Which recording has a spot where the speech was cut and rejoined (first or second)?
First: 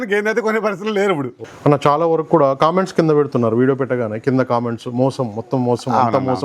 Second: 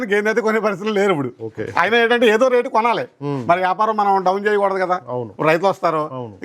first